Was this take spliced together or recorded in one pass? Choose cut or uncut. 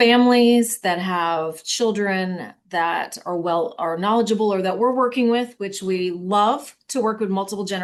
uncut